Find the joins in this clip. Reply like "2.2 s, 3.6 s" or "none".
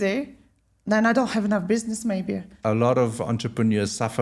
2.5 s